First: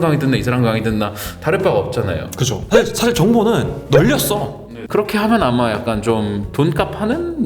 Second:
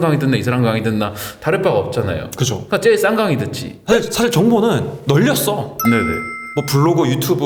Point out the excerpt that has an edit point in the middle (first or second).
first